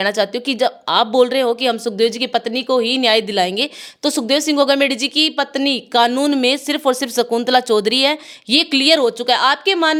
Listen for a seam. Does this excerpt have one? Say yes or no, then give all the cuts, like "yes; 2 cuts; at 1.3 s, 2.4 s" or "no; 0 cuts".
no; 0 cuts